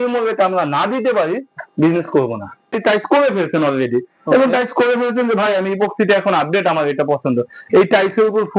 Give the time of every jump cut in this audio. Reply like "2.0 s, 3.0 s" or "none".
2.8 s